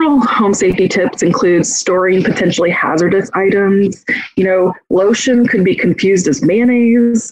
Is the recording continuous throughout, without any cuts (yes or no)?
yes